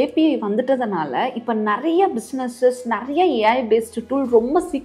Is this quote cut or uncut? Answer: uncut